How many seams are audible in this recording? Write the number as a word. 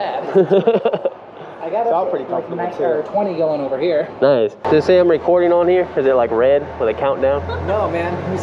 one